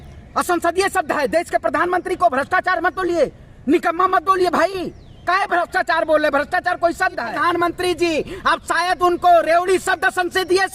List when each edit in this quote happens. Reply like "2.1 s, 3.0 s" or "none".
7.3 s

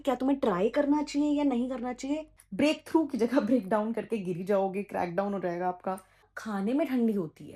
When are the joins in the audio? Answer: 2.4 s, 6.3 s

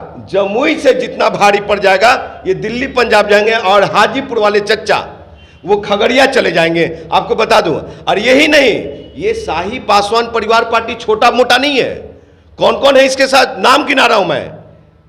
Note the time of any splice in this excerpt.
none

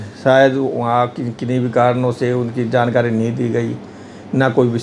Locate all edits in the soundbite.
none

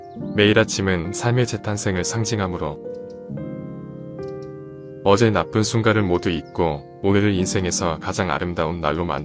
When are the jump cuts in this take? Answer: 3.2 s, 5.0 s

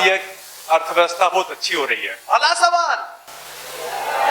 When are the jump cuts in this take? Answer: none

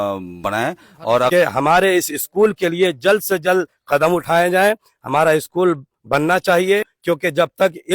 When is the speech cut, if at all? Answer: 1.3 s, 6.9 s

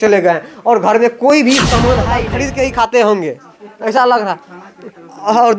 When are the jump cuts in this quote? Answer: 2.3 s

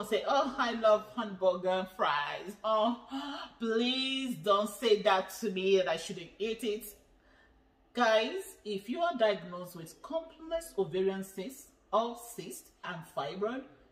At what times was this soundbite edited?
13.0 s

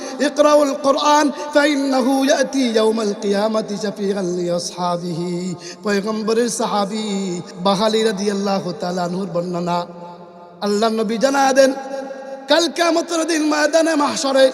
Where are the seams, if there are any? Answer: 7.5 s

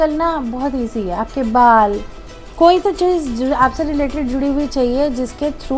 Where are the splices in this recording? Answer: none

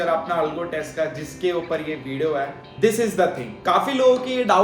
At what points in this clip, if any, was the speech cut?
2.6 s, 3.5 s

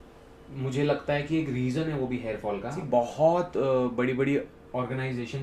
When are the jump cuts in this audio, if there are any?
2.8 s

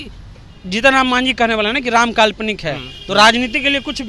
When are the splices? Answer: none

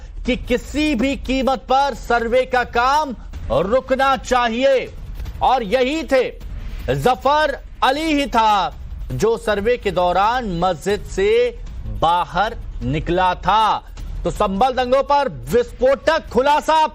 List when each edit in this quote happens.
4.5 s

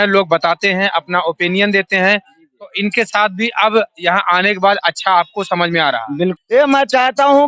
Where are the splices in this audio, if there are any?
6.4 s

